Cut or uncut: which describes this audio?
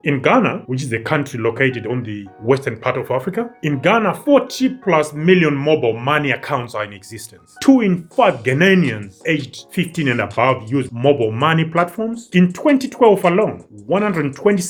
uncut